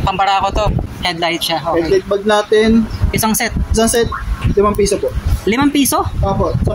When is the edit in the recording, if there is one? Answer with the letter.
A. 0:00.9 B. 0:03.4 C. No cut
A